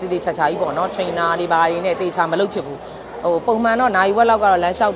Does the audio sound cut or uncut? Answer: uncut